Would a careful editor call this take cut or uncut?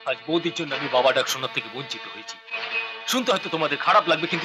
uncut